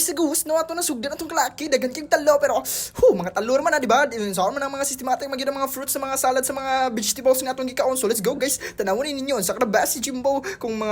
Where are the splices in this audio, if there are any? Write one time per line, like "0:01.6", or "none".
none